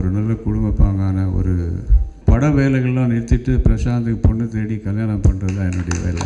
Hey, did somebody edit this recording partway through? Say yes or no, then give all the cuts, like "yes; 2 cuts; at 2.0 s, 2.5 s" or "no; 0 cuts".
yes; 1 cut; at 2.1 s